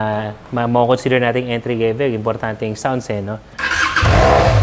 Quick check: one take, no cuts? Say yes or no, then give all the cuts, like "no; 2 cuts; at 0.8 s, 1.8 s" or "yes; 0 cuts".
no; 1 cut; at 3.5 s